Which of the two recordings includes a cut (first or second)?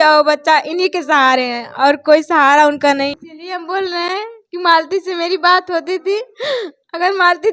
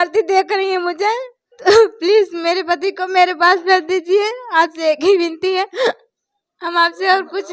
first